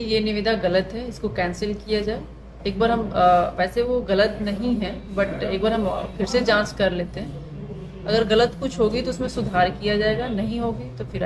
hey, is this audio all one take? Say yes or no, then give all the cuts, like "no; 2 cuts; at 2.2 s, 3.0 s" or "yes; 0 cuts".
yes; 0 cuts